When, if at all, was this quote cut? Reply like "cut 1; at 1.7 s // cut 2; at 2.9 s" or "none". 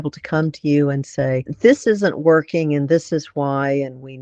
cut 1; at 1.5 s